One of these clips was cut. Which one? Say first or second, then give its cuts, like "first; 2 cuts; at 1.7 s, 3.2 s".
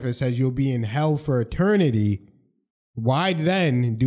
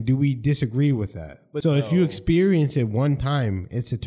second; 1 cut; at 1.5 s